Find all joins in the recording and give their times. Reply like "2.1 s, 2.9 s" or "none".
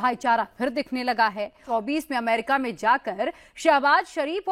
1.6 s